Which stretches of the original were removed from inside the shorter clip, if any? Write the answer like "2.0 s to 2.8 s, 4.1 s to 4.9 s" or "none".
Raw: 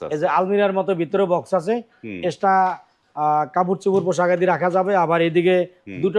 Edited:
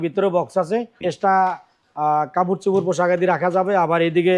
1.9 s to 2.1 s